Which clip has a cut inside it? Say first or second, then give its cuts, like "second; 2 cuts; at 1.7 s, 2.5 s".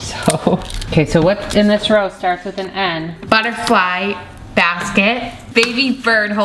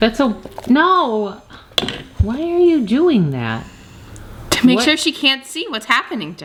first; 3 cuts; at 0.9 s, 3.2 s, 5.4 s